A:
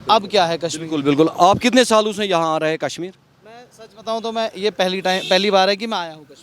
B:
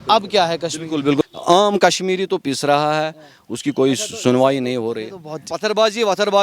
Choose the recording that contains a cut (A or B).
B